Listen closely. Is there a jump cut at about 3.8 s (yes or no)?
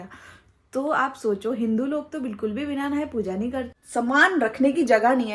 yes